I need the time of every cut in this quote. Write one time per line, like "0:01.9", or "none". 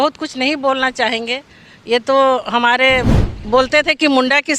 0:03.1